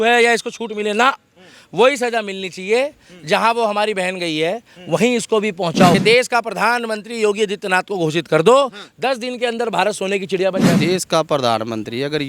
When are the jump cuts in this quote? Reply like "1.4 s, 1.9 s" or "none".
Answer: 5.9 s, 10.7 s